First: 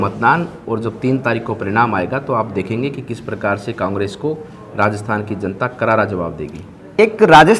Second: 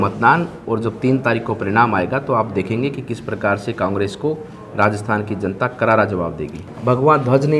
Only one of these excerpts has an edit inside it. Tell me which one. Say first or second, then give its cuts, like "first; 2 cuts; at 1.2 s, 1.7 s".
second; 1 cut; at 6.7 s